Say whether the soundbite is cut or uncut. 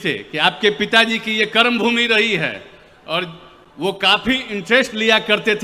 uncut